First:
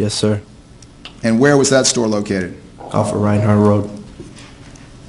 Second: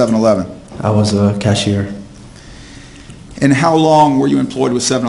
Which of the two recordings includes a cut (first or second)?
second